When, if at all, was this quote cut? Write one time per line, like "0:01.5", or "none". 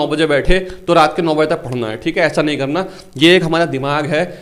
none